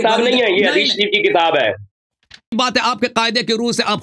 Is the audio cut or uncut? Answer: cut